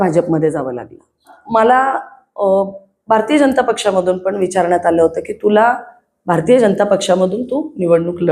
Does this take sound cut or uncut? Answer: cut